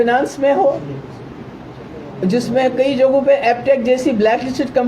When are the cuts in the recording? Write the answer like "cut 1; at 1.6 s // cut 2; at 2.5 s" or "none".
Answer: none